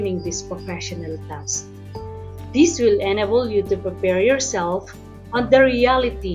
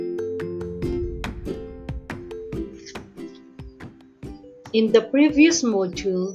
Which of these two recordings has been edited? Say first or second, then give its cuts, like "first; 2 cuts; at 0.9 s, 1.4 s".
second; 1 cut; at 4.7 s